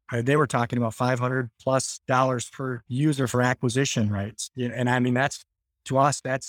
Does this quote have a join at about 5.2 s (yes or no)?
no